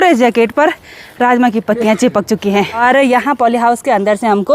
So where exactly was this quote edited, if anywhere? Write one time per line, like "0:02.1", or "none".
0:02.8